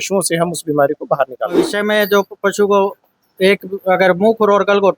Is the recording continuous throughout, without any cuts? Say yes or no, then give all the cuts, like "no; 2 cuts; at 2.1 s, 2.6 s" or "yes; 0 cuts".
no; 1 cut; at 1.6 s